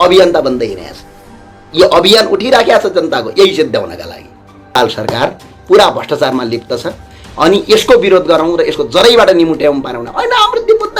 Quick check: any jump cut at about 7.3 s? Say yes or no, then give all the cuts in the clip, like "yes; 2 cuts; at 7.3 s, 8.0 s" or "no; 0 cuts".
no; 1 cut; at 4.7 s